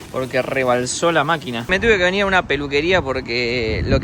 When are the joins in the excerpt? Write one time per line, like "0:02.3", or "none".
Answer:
0:01.7

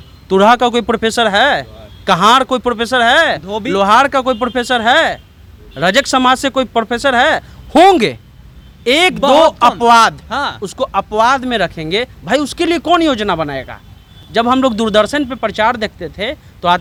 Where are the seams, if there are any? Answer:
none

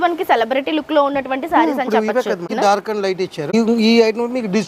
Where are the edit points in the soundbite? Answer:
0:02.5
0:03.5

